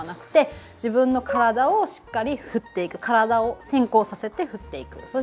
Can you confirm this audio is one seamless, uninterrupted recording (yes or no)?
yes